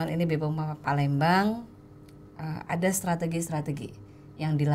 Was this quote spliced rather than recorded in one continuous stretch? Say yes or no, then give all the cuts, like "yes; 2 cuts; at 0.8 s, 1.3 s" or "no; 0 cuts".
no; 0 cuts